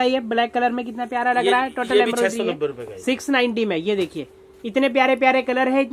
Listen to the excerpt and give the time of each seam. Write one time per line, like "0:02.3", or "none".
none